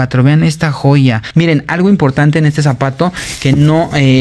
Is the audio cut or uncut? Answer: cut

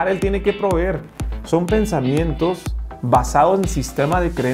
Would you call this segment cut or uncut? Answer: uncut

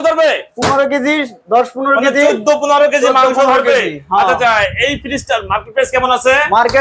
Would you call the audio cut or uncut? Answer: uncut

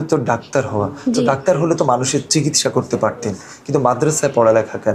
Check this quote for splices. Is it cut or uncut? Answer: uncut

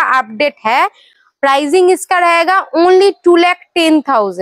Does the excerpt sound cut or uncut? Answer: uncut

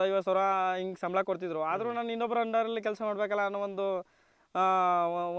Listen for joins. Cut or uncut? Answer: uncut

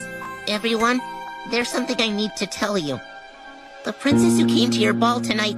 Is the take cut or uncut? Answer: uncut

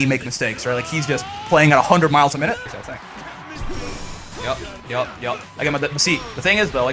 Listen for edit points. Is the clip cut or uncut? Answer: cut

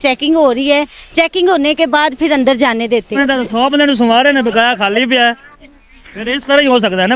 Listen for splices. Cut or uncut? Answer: cut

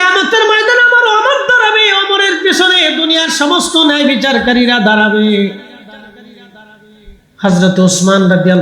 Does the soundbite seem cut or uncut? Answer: uncut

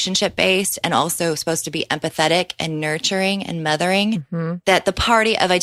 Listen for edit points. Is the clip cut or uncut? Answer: uncut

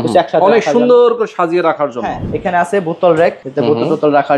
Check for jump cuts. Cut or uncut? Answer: cut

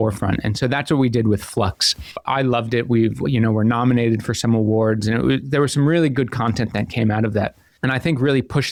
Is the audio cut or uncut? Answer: uncut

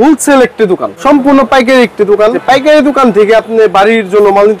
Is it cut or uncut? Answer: cut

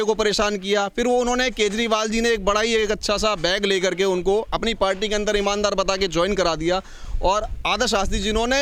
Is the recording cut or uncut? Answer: uncut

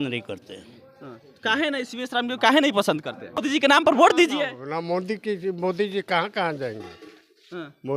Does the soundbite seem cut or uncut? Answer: cut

